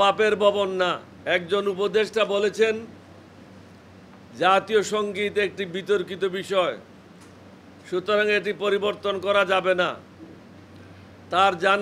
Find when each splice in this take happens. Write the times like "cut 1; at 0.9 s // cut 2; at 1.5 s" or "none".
cut 1; at 1.1 s